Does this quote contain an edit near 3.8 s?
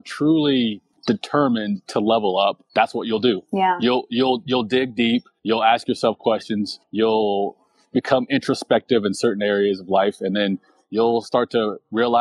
no; 4 cuts; at 0.9 s, 2.6 s, 5.3 s, 6.8 s

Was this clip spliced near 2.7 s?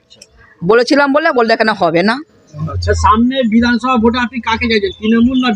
yes; 1 cut; at 2.7 s

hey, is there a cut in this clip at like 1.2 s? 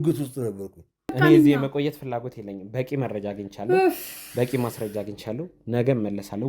yes; 1 cut; at 1.2 s

